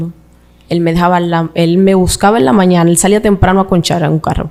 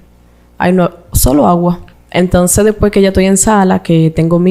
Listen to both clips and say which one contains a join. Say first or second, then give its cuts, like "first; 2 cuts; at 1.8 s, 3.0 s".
second; 1 cut; at 1.9 s